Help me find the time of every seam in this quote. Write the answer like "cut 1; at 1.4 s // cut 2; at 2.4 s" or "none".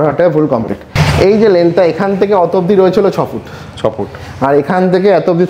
cut 1; at 1.0 s